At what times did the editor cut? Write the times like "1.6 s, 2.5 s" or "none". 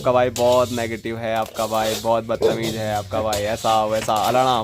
none